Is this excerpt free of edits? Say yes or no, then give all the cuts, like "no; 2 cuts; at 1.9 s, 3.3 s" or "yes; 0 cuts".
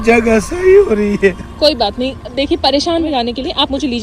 no; 1 cut; at 2.9 s